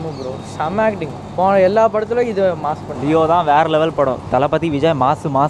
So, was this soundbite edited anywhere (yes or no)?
no